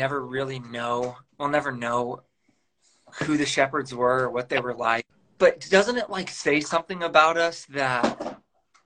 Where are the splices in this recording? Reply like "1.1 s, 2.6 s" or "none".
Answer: 5.2 s